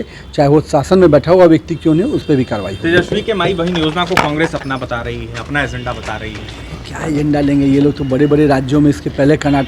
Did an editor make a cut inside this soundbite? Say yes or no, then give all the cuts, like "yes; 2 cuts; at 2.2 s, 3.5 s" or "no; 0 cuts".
no; 0 cuts